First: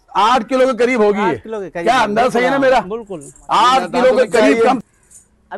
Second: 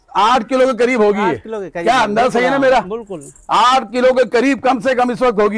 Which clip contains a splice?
first; 1 cut; at 4.6 s

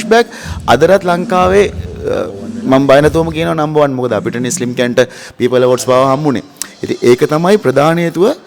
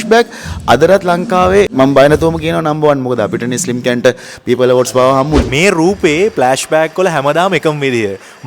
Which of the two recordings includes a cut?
second; 2 cuts; at 1.7 s, 5.5 s

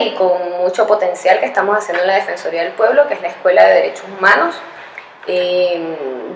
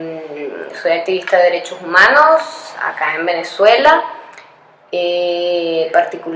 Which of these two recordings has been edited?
first; 1 cut; at 4.7 s

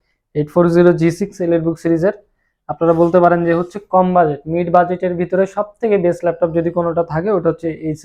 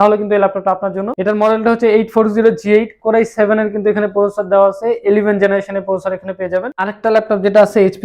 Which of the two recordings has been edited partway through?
second; 2 cuts; at 1.1 s, 6.7 s

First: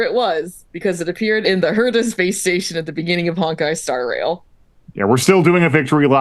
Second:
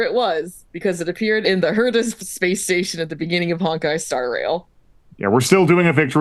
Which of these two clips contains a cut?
first; 1 cut; at 2.1 s

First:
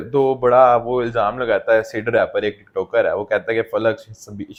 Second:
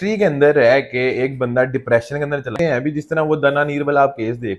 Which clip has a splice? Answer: second; 1 cut; at 2.5 s

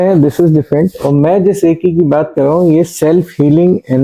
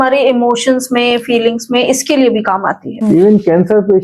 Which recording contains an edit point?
second; 1 cut; at 2.9 s

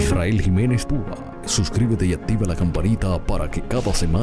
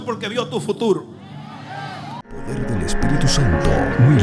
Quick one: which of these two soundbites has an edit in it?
second; 1 cut; at 2.5 s

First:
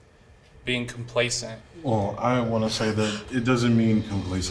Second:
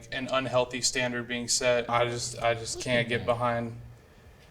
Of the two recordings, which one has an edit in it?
second; 1 cut; at 1.9 s

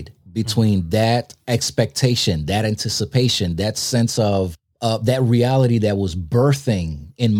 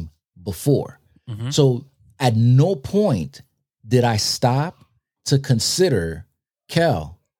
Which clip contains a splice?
first; 1 cut; at 4.6 s

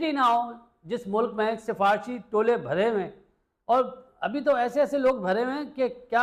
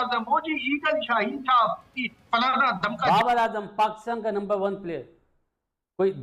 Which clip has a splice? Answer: second; 1 cut; at 3.1 s

